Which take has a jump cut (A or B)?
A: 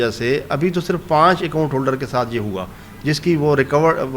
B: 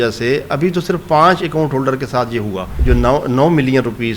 B